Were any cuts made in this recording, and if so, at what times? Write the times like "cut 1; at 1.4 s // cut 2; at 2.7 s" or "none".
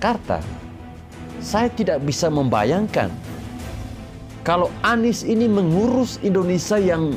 none